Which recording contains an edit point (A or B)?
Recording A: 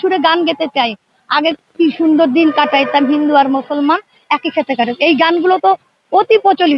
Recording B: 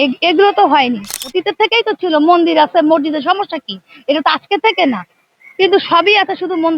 B